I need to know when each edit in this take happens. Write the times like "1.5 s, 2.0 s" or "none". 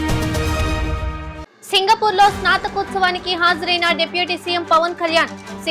1.3 s